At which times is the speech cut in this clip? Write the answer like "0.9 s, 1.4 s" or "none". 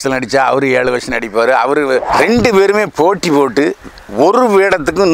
2.1 s